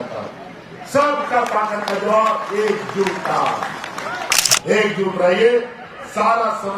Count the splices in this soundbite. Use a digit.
1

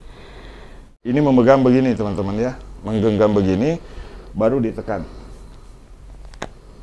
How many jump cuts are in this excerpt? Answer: 1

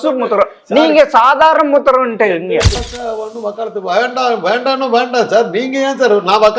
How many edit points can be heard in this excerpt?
1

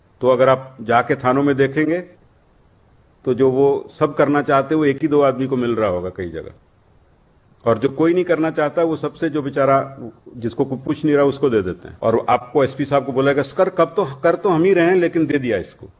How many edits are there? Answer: 1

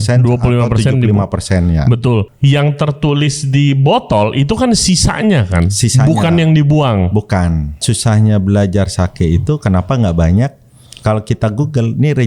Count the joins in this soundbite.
2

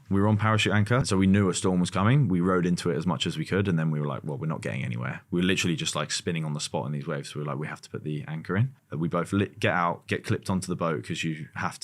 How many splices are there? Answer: 2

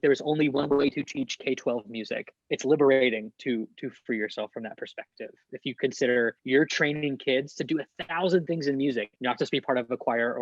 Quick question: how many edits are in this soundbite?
3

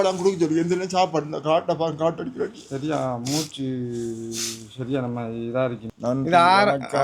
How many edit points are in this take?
1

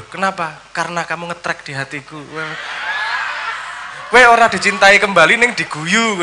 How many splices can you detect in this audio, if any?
0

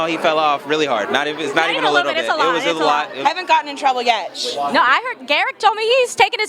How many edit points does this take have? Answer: 1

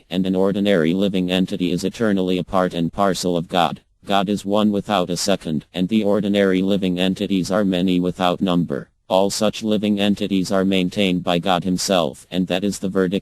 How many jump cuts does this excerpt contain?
0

